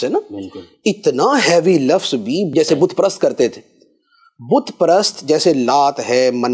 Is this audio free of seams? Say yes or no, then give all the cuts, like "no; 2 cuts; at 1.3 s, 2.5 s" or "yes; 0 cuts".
no; 1 cut; at 2.5 s